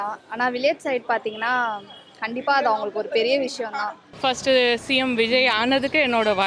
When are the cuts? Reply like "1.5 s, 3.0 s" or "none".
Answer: 4.1 s